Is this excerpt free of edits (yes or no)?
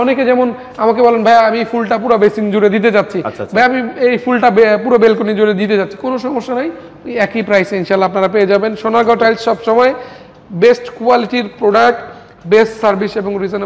yes